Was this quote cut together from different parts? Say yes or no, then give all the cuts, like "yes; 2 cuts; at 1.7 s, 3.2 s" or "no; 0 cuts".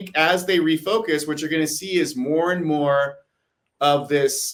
no; 0 cuts